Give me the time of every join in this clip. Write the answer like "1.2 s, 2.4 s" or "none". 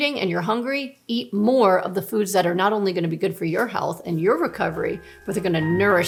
none